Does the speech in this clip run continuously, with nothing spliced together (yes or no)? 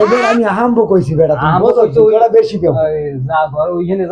yes